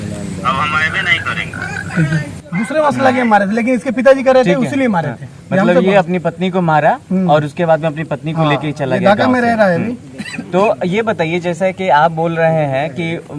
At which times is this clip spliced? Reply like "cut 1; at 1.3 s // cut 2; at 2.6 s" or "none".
none

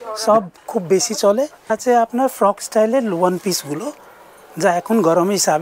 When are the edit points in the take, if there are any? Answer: cut 1; at 1.7 s

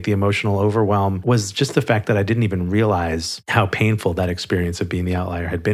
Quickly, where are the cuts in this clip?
cut 1; at 1.2 s

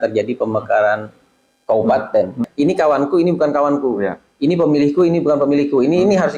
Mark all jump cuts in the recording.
cut 1; at 2.4 s

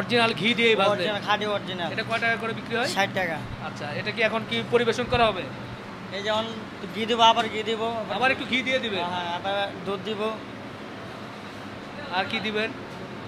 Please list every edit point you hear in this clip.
none

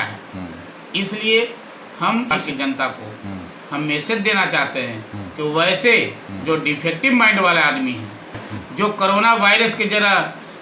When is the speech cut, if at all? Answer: cut 1; at 2.3 s // cut 2; at 8.4 s

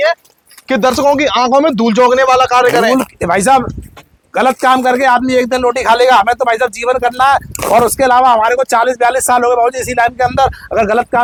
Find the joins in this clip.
none

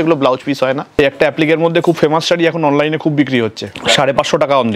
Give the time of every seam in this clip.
cut 1; at 1.0 s // cut 2; at 3.7 s

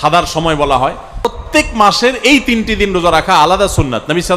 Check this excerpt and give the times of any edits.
cut 1; at 1.4 s

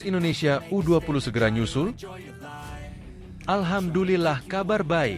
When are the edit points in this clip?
cut 1; at 2.1 s // cut 2; at 3.4 s

